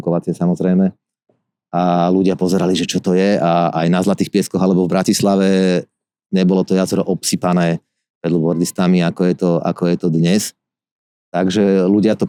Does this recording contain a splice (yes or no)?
no